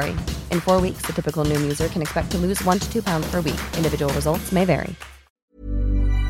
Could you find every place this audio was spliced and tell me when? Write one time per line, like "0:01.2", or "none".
0:05.4